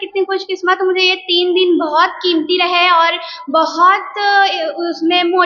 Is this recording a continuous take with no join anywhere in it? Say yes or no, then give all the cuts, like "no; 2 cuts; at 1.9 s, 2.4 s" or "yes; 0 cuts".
yes; 0 cuts